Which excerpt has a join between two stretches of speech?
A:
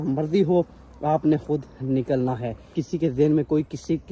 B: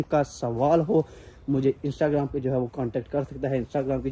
A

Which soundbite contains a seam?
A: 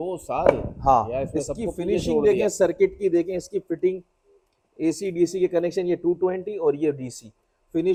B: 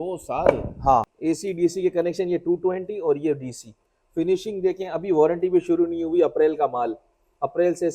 B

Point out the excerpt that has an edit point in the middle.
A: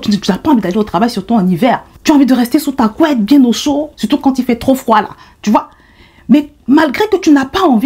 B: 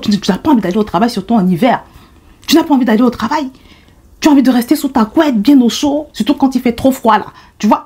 A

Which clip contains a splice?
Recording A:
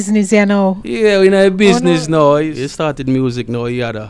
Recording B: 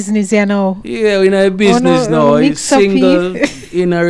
A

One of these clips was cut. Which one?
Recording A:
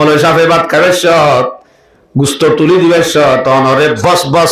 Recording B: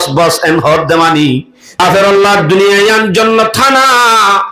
B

